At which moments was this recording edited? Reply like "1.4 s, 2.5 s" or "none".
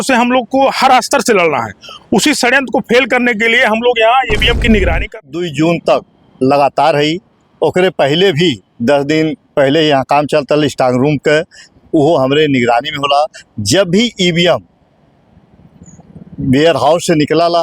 5.1 s